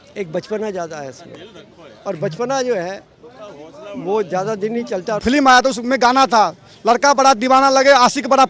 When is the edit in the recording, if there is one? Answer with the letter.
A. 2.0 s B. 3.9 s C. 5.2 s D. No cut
C